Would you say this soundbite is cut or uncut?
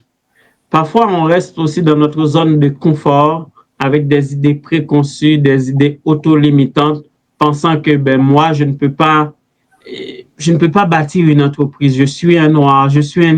uncut